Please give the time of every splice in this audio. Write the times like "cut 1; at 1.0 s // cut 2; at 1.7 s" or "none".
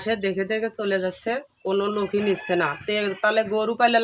none